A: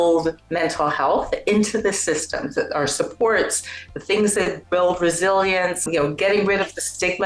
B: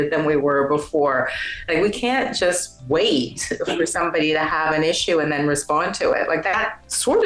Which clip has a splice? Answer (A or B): A